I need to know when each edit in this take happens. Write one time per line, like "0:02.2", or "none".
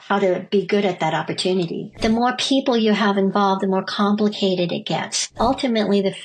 0:02.0
0:05.3

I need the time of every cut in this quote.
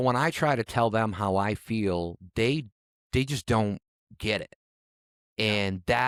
none

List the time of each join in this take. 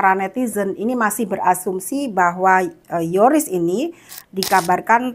none

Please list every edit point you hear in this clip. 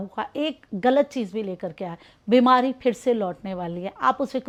none

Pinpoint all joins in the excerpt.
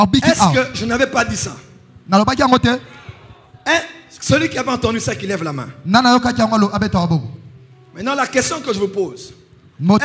none

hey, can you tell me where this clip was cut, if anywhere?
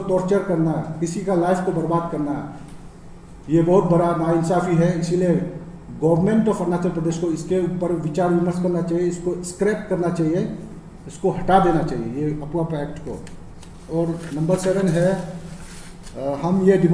none

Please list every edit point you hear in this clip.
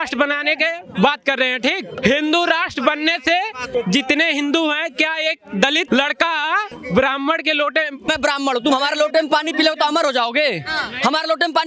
0:01.9
0:03.6
0:05.8
0:06.7
0:08.1

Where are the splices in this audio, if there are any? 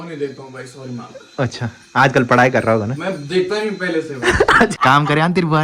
0:04.7

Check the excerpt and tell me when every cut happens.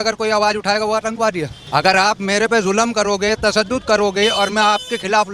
0:01.6

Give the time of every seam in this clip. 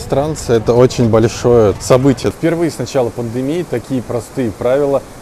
0:01.9

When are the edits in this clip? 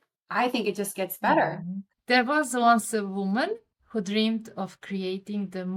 0:01.9

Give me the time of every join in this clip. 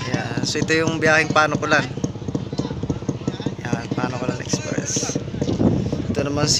none

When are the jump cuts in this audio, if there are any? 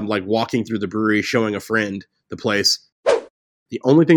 0:03.0

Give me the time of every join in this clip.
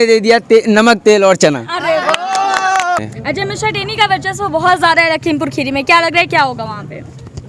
0:03.0

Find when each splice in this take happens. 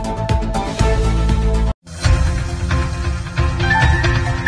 none

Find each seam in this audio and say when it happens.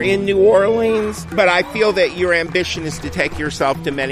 0:01.2

